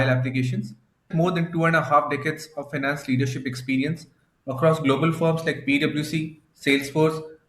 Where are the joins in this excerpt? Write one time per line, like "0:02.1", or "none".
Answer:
0:01.1